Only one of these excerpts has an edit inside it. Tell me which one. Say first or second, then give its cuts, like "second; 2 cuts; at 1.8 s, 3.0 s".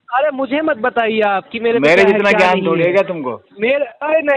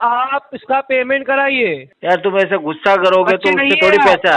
second; 1 cut; at 1.9 s